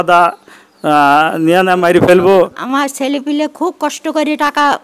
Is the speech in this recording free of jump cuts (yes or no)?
no